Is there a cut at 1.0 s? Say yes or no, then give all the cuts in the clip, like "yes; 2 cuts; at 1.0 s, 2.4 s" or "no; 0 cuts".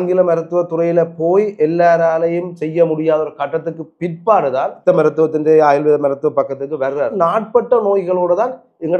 no; 2 cuts; at 4.8 s, 7.1 s